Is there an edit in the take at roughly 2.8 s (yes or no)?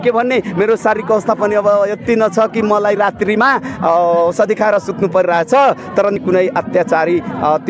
no